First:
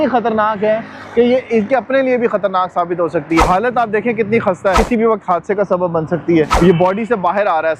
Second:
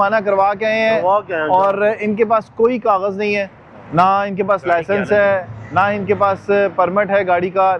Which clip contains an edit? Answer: first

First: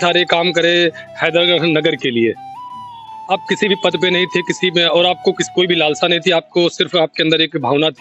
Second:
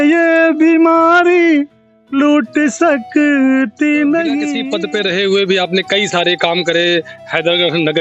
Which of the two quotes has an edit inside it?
second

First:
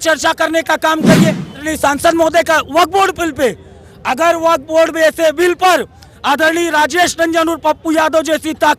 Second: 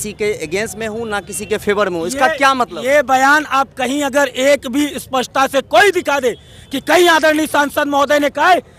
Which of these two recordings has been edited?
first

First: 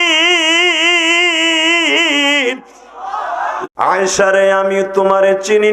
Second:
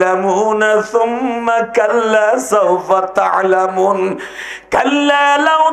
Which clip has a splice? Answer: first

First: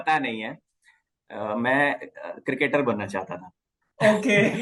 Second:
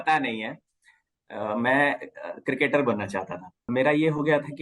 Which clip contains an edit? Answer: second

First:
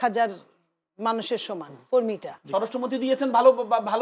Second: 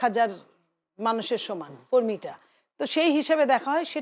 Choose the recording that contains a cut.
first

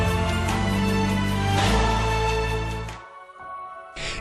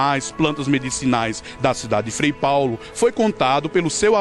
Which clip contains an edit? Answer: second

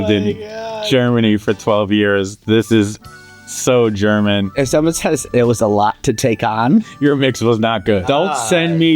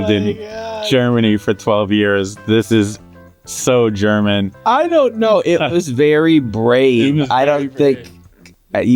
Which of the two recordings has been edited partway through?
first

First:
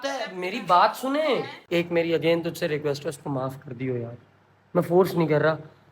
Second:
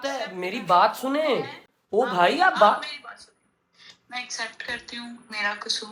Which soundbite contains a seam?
first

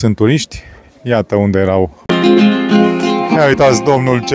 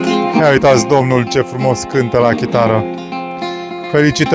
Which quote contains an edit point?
first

